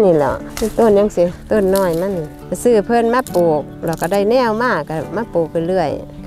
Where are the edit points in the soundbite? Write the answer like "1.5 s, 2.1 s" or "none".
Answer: none